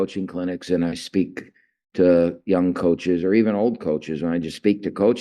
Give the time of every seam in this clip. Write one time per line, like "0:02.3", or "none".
none